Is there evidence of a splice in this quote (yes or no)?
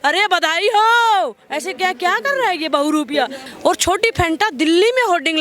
yes